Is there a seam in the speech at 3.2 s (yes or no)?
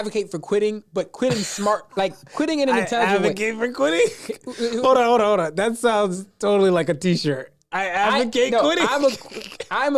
no